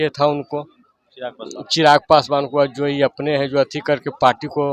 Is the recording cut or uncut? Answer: uncut